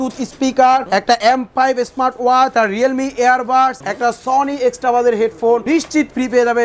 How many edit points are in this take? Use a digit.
4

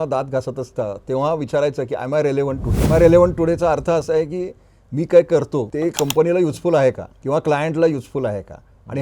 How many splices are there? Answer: 3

